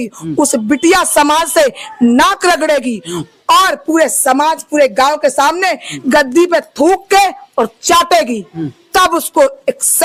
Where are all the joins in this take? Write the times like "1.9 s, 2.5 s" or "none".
none